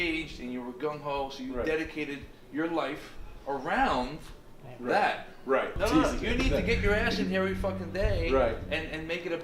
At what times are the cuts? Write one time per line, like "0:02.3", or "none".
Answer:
0:05.7